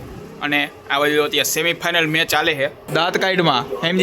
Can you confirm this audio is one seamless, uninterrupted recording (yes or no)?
no